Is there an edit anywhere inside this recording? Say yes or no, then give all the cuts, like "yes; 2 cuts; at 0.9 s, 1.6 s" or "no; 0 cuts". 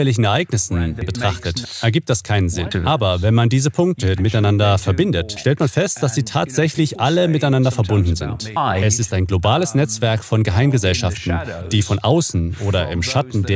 yes; 5 cuts; at 1.1 s, 2.7 s, 4.2 s, 5.3 s, 8.5 s